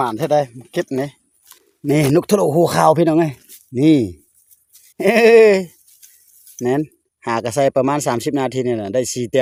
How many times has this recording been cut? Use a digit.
0